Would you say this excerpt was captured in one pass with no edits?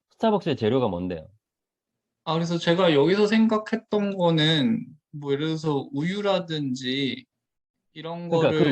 yes; 0 cuts

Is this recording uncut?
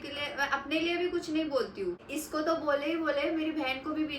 no; 1 cut; at 2.1 s

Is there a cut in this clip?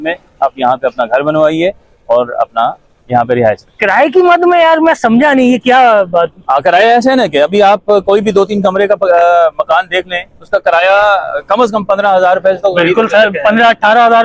no; 0 cuts

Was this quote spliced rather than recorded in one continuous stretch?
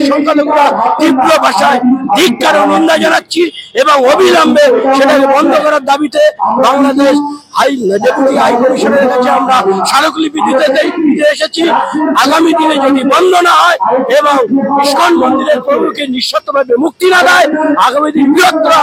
no; 0 cuts

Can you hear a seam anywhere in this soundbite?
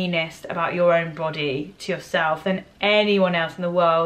no; 0 cuts

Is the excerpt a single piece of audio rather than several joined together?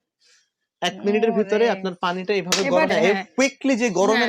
no; 1 cut; at 2.9 s

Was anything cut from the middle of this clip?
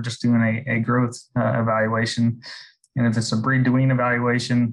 no; 0 cuts

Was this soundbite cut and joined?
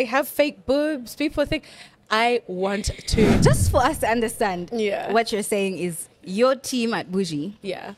yes; 1 cut; at 3.4 s

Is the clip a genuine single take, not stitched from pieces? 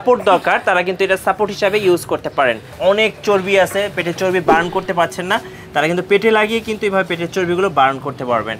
no; 1 cut; at 2.7 s

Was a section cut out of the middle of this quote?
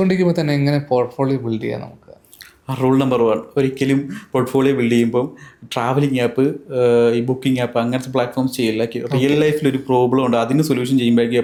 no; 0 cuts

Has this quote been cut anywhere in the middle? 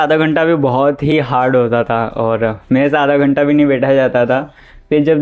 no; 0 cuts

